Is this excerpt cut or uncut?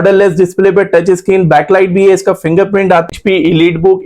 cut